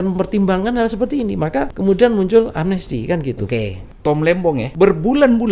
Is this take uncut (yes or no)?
no